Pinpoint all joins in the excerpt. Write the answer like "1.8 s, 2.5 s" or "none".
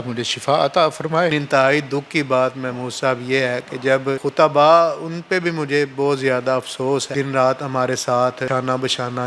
1.3 s, 4.2 s, 7.1 s, 8.5 s